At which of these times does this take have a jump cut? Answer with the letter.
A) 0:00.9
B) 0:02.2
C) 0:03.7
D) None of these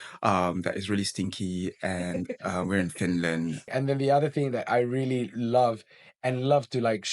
C